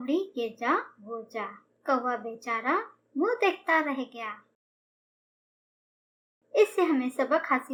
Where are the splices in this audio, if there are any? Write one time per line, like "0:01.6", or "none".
none